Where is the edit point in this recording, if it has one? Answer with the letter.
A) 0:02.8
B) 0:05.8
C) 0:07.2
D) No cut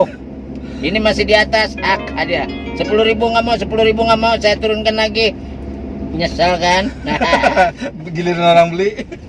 C